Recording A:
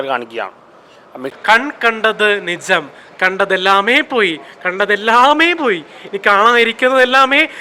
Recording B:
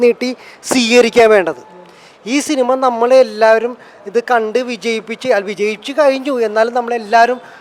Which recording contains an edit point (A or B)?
A